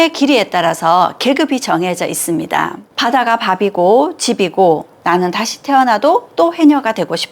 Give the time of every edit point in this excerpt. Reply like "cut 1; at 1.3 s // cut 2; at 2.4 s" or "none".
cut 1; at 2.8 s